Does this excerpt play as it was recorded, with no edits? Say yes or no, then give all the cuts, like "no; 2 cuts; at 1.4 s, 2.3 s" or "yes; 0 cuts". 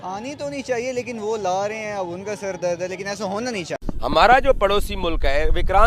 no; 1 cut; at 3.8 s